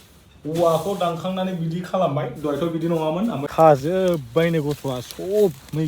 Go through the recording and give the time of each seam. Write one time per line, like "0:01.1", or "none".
0:03.4